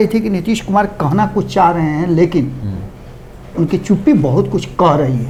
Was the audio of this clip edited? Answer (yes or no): no